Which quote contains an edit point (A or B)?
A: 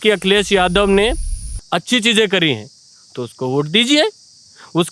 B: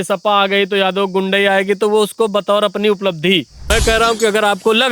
B